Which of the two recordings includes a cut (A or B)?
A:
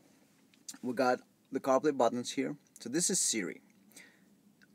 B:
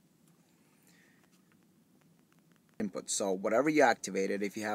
B